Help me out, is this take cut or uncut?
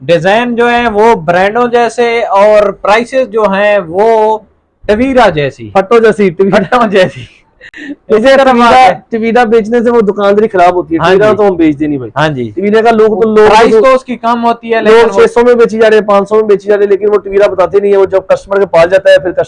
uncut